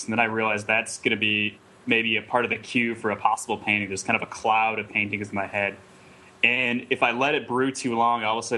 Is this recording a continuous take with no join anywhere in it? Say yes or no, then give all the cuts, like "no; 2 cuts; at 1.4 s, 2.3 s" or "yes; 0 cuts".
yes; 0 cuts